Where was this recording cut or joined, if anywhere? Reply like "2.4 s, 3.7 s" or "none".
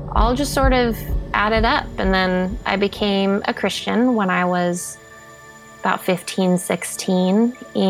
none